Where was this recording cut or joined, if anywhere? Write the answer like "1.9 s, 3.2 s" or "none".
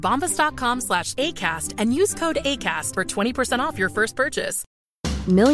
4.6 s

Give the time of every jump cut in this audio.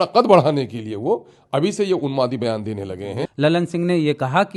3.2 s

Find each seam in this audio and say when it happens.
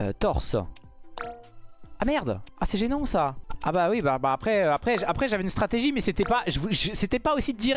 2.5 s, 3.5 s

